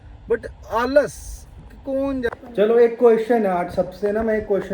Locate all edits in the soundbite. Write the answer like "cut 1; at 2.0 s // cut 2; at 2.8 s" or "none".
cut 1; at 2.3 s